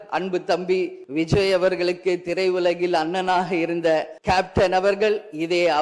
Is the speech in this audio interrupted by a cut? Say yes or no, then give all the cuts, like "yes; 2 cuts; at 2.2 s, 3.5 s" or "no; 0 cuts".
yes; 2 cuts; at 1.0 s, 4.1 s